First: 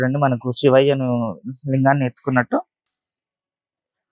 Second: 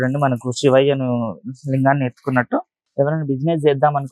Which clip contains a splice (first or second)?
second